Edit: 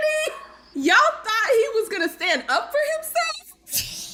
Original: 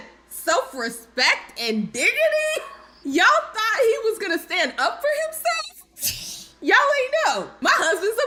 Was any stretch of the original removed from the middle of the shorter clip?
no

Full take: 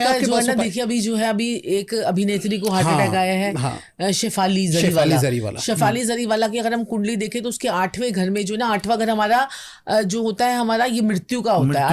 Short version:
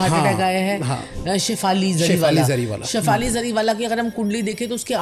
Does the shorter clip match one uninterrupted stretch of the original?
yes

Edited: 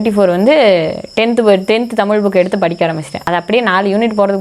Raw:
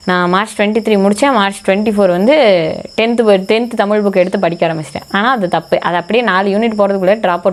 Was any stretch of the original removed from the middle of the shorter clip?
yes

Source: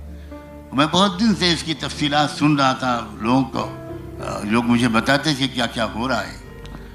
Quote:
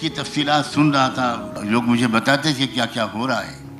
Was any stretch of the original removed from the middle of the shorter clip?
yes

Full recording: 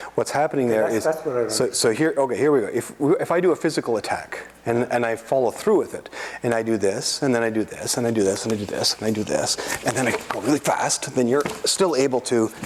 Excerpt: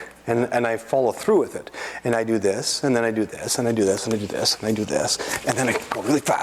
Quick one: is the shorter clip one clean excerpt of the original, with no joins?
yes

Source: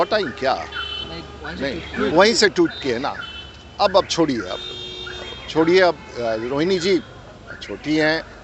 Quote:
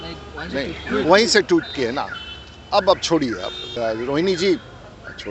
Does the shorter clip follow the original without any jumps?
no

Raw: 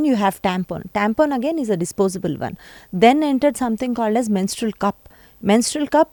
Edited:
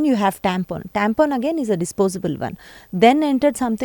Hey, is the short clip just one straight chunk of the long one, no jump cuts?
yes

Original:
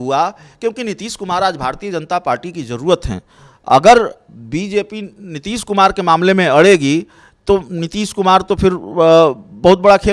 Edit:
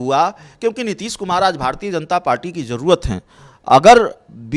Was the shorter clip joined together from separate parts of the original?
no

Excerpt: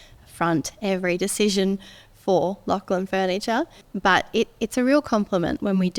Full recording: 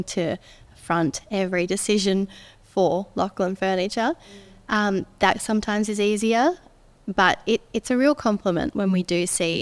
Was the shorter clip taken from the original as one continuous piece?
no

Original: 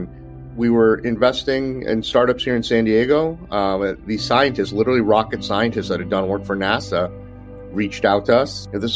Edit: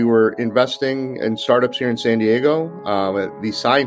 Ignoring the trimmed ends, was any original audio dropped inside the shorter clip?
no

